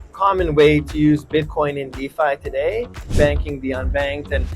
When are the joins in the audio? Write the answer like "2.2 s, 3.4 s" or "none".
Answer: 3.1 s